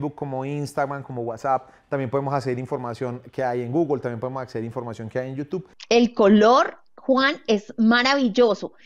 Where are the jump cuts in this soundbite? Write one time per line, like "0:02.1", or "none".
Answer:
0:05.7